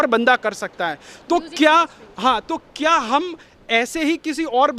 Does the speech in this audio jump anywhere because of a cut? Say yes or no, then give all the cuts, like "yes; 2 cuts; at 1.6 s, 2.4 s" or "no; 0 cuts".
no; 0 cuts